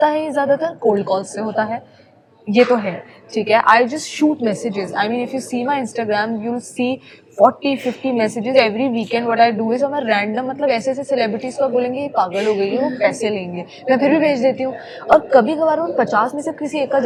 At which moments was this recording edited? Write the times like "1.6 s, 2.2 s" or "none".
none